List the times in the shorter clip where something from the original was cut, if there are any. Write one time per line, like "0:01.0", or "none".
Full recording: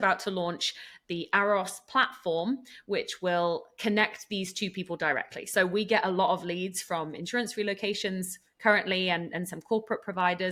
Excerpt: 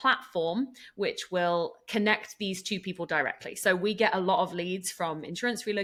none